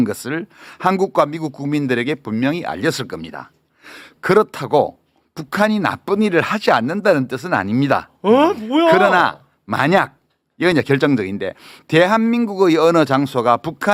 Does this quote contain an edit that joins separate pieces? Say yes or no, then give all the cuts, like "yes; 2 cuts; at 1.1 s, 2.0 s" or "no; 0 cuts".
no; 0 cuts